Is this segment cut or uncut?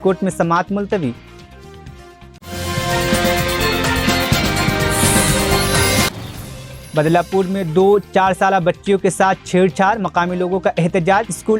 uncut